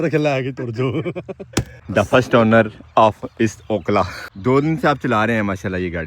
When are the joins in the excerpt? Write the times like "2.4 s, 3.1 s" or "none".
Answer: 1.8 s, 4.2 s